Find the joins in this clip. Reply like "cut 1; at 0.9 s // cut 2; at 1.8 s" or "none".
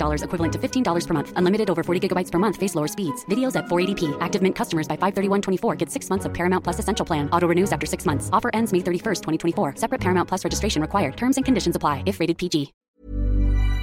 cut 1; at 12.8 s

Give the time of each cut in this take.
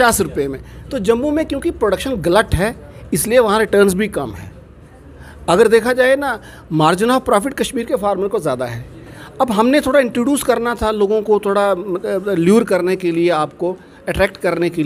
none

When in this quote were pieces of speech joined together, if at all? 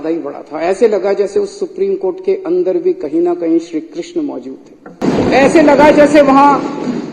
cut 1; at 5.0 s

